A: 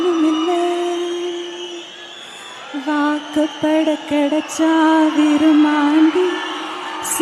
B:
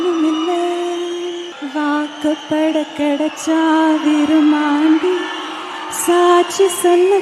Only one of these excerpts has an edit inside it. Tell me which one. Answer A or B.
B